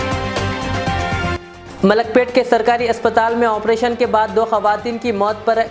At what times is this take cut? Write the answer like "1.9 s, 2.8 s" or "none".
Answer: none

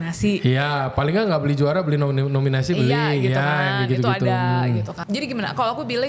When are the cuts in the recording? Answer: 4.9 s

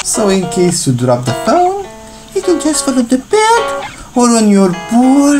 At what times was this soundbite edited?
none

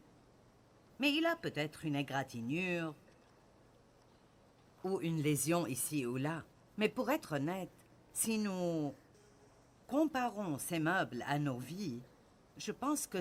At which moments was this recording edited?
none

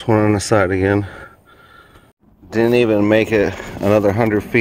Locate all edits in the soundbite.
2.6 s

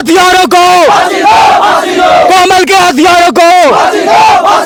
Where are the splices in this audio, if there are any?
none

